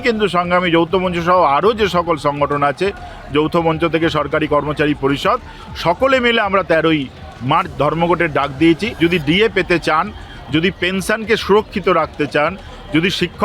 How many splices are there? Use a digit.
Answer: 1